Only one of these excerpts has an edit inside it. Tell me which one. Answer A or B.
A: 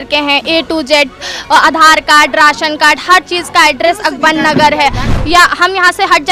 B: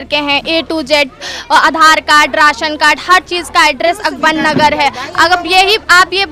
A